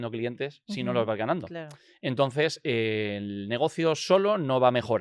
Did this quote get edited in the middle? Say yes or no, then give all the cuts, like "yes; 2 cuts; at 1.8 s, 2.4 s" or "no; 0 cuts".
no; 0 cuts